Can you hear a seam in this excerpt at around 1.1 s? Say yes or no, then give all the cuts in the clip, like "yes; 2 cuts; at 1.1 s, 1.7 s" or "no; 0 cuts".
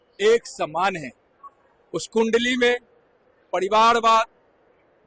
no; 0 cuts